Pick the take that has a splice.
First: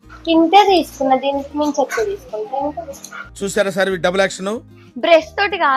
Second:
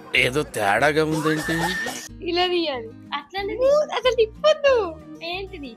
second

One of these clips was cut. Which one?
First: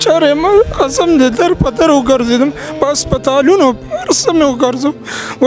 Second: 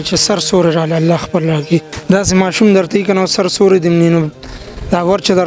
second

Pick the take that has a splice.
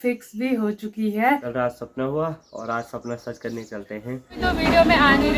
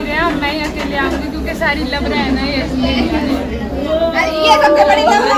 first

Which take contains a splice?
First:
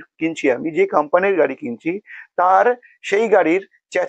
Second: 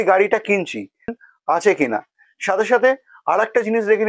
second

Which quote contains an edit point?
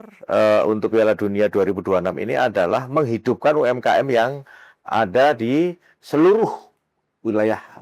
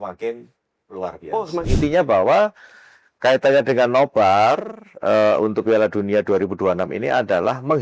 second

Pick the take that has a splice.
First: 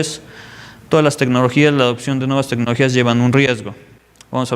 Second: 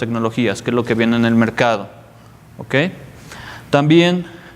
first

